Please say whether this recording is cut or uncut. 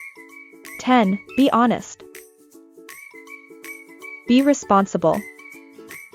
cut